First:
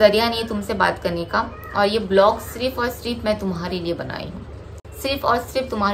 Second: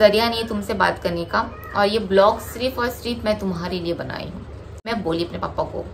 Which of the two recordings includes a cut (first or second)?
second